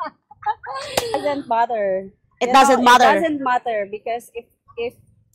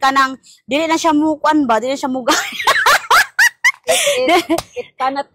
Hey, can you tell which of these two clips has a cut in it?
first; 1 cut; at 1.2 s

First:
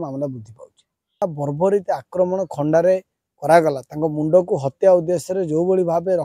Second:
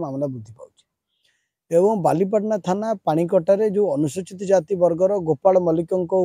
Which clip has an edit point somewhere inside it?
first; 1 cut; at 1.2 s

